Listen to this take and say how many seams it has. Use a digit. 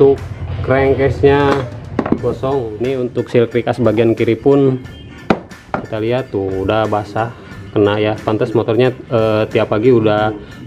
1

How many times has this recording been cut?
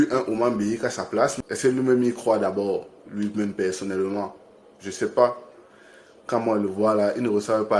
1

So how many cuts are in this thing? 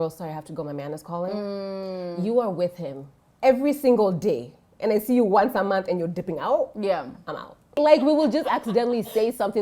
1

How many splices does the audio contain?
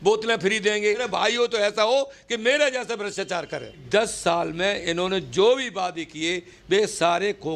2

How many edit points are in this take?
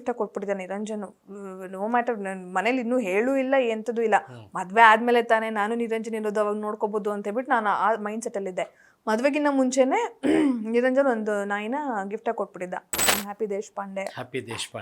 1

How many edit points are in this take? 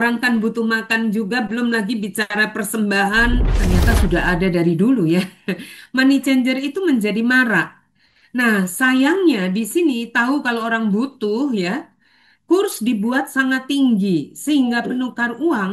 1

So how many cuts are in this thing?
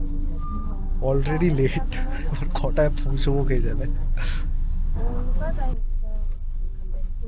0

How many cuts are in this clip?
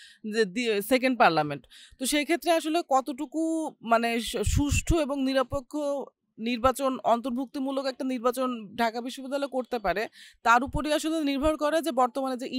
0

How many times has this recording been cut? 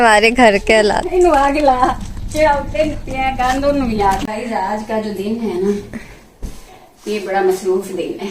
1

